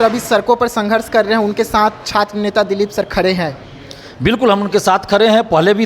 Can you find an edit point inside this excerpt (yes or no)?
no